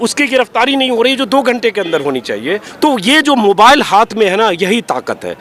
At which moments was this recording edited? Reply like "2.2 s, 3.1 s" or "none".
2.7 s